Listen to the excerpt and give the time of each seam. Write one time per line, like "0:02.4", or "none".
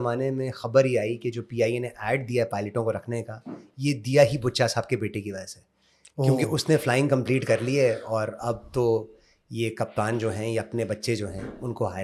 none